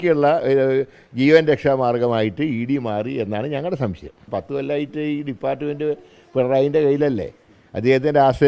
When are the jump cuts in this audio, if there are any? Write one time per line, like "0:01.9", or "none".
0:04.2